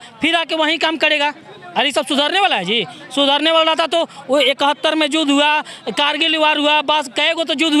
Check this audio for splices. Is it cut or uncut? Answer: uncut